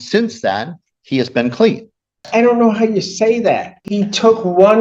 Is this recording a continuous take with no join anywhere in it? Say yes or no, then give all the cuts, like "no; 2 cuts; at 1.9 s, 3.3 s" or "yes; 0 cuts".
no; 2 cuts; at 2.3 s, 3.8 s